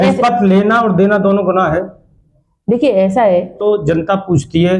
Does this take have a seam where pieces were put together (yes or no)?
yes